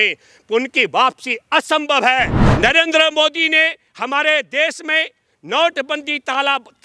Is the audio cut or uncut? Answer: cut